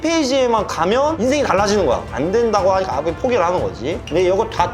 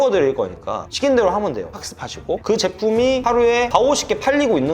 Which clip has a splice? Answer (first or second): second